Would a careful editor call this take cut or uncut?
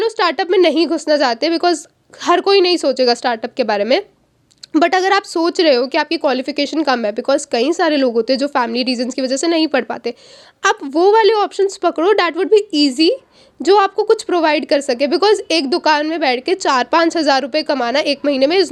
uncut